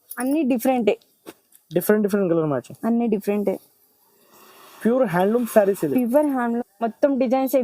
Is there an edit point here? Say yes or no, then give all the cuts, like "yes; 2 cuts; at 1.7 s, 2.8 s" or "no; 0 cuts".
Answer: yes; 1 cut; at 6.6 s